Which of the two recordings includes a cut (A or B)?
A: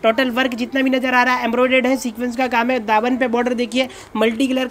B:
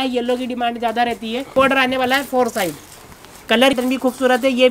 B